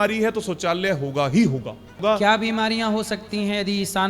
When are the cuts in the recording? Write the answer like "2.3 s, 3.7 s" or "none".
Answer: 2.0 s